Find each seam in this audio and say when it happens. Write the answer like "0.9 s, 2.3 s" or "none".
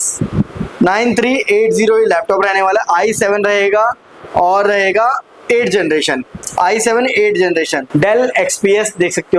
7.8 s